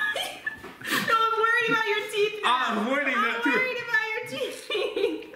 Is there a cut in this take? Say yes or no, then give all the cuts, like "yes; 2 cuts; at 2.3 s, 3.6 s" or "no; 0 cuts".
yes; 1 cut; at 2.5 s